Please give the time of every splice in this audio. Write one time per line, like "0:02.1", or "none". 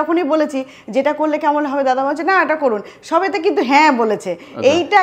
none